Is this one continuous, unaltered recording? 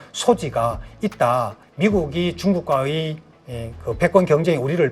no; 1 cut; at 1.6 s

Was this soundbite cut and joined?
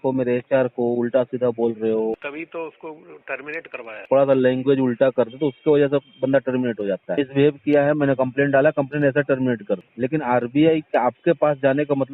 yes; 4 cuts; at 2.3 s, 4.0 s, 7.1 s, 9.9 s

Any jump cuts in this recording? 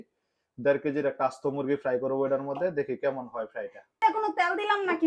yes; 1 cut; at 3.8 s

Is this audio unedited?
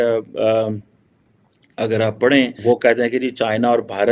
no; 1 cut; at 2.6 s

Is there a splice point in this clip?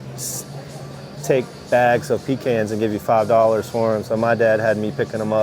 no; 0 cuts

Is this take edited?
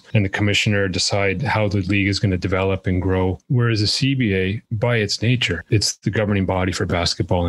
yes; 3 cuts; at 3.4 s, 4.6 s, 5.6 s

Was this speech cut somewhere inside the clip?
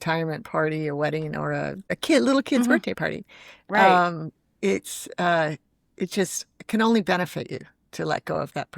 yes; 1 cut; at 2.0 s

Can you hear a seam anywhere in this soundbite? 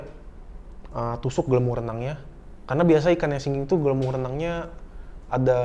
no; 0 cuts

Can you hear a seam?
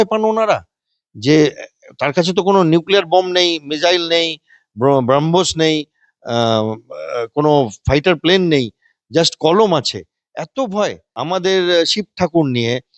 yes; 1 cut; at 11.1 s

